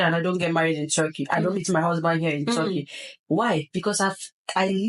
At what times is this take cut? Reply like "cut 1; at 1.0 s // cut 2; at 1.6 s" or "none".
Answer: none